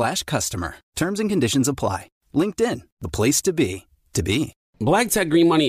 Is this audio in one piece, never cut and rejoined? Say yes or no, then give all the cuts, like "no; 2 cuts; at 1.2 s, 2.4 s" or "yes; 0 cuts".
no; 1 cut; at 4.6 s